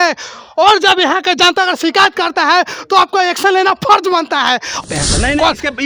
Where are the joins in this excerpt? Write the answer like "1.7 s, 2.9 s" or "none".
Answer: 4.8 s